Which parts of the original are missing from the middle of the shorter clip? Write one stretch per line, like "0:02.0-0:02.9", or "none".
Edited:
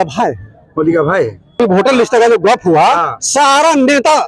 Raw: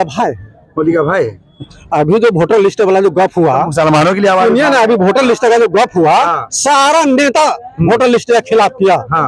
0:01.6-0:04.9